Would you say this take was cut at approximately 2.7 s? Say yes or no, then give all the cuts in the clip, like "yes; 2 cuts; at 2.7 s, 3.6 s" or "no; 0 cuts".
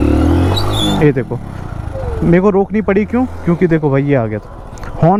no; 0 cuts